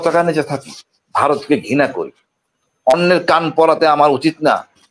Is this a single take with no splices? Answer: yes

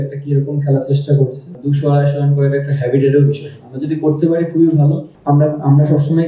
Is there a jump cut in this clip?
yes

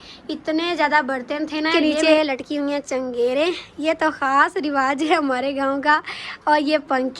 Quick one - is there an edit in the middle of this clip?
yes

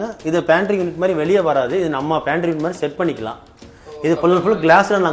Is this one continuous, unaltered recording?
yes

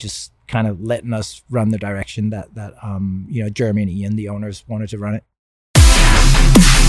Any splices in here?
yes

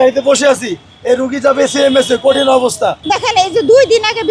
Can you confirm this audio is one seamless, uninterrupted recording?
no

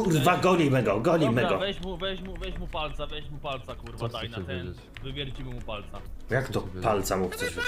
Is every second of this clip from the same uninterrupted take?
yes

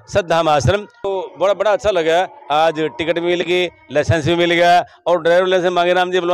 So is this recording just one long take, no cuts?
no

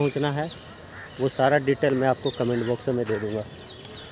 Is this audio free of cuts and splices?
yes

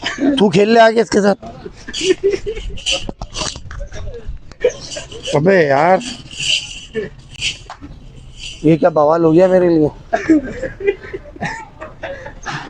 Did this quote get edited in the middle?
no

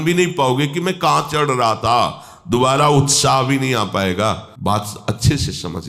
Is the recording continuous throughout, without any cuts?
yes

